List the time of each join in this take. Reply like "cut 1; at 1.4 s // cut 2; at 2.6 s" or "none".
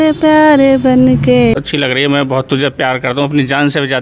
cut 1; at 1.5 s